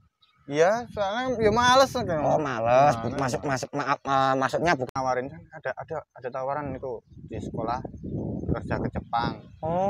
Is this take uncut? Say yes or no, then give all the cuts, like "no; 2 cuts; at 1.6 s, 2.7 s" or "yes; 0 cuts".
no; 1 cut; at 4.8 s